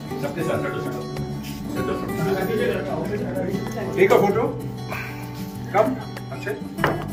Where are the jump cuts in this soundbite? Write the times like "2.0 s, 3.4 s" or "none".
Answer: none